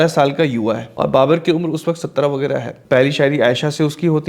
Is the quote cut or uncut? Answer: cut